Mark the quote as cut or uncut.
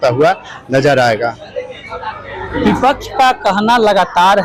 uncut